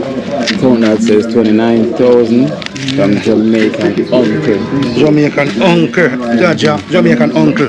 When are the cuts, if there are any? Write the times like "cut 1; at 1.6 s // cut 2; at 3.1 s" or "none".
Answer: none